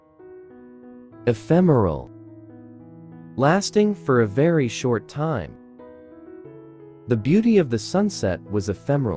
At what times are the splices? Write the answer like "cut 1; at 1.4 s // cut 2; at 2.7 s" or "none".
none